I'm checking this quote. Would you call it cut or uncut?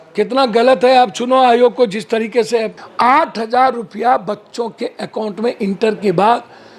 cut